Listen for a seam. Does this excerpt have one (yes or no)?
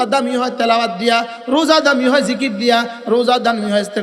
no